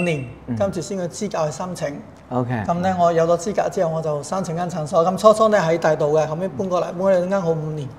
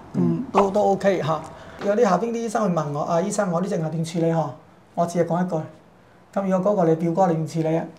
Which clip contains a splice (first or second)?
second